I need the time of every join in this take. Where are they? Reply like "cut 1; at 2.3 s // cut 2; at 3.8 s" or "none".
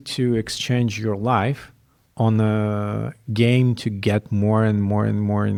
none